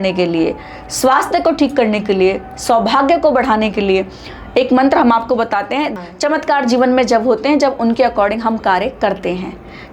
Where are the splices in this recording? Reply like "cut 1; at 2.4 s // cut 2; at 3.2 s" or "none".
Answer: cut 1; at 5.9 s